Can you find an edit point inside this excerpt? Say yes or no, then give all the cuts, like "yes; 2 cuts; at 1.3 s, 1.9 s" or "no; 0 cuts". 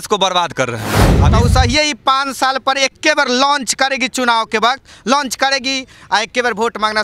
yes; 1 cut; at 1.2 s